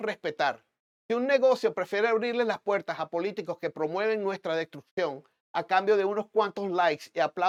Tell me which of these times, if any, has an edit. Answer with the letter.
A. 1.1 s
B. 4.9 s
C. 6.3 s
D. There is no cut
D